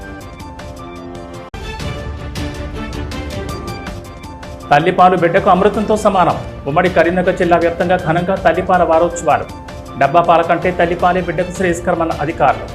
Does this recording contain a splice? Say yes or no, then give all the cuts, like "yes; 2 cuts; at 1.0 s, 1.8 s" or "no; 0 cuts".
yes; 1 cut; at 1.1 s